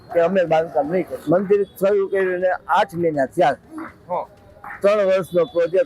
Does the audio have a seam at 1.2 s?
yes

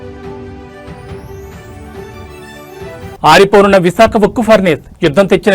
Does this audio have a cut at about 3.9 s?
no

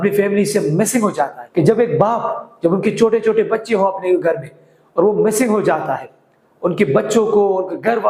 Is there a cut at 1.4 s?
yes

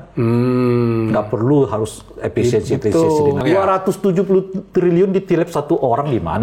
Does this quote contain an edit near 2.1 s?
no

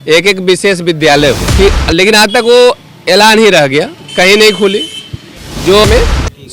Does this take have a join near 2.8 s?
no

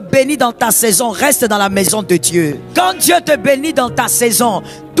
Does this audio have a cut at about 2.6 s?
yes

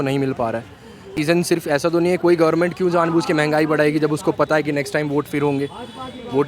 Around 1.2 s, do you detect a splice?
yes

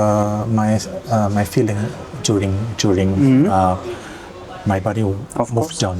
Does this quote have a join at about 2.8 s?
no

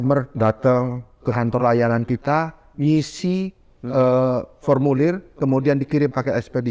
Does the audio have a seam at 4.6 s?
no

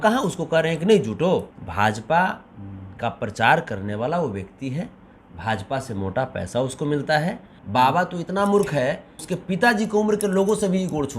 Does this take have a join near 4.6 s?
no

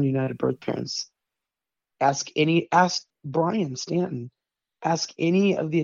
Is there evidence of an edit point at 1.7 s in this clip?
no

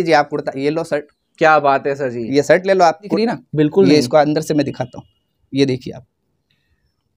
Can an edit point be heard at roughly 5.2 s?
no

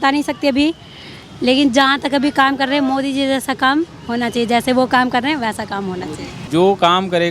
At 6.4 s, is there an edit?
yes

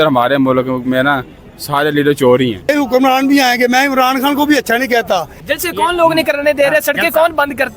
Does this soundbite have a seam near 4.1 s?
no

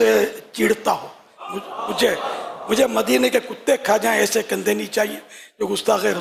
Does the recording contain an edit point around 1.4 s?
no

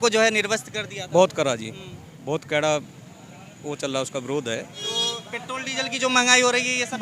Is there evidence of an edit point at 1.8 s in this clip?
no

